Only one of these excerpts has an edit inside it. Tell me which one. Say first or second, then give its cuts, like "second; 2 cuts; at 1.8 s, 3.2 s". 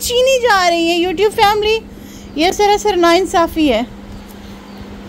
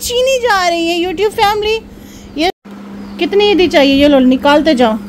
second; 1 cut; at 2.6 s